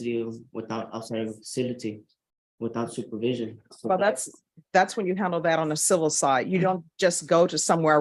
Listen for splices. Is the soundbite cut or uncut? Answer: uncut